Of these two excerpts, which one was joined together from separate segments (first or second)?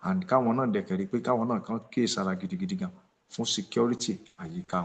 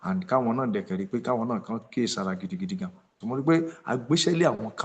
second